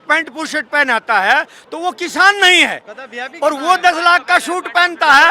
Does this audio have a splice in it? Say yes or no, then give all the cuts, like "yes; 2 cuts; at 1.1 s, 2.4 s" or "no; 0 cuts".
no; 0 cuts